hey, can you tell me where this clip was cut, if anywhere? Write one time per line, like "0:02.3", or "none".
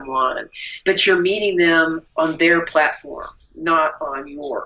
0:02.0